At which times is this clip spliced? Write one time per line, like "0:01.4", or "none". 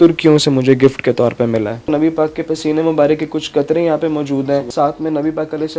0:01.8
0:04.7